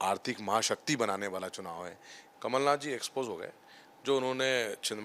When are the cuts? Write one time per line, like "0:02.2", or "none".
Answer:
0:02.2